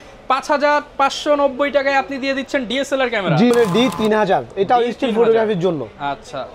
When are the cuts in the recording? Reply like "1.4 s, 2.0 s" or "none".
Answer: 3.5 s